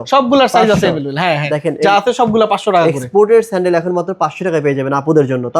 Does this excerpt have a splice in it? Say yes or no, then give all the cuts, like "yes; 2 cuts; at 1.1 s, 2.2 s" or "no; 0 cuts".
no; 0 cuts